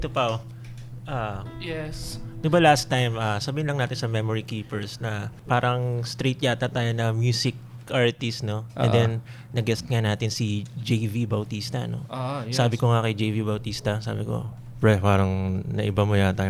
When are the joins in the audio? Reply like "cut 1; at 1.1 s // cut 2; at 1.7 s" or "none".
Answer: cut 1; at 5.3 s // cut 2; at 7.9 s